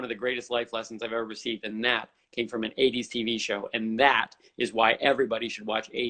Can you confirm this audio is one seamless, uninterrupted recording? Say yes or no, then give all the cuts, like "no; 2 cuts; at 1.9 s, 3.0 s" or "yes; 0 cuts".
yes; 0 cuts